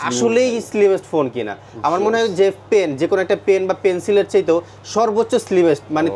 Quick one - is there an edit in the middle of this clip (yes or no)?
no